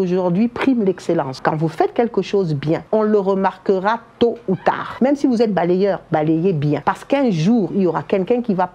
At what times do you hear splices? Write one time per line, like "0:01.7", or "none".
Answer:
0:01.3
0:02.8
0:04.9
0:06.8